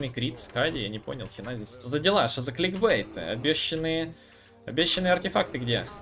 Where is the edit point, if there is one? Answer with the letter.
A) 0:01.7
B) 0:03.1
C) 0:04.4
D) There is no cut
A